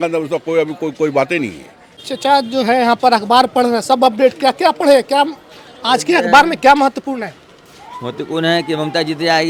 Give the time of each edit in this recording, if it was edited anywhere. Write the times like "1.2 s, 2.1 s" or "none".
none